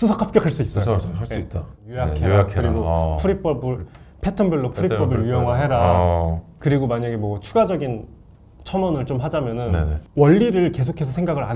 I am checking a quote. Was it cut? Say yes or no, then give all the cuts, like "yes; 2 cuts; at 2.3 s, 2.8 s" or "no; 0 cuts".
yes; 3 cuts; at 1.9 s, 6.5 s, 10.0 s